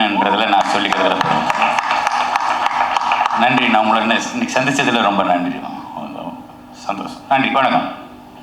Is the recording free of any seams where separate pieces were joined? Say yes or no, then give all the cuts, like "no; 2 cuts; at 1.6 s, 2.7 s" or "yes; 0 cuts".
yes; 0 cuts